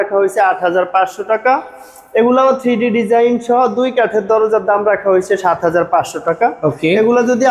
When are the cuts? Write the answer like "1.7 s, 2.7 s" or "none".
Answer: none

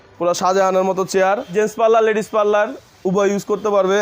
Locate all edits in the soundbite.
1.5 s

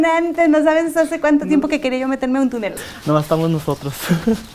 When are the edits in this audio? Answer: 2.7 s

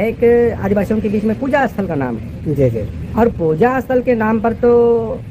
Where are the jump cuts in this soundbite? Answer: none

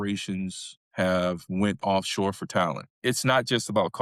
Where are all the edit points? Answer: 2.9 s

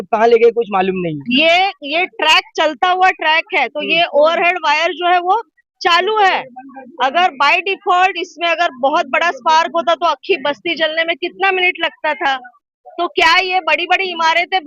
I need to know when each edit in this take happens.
1.2 s

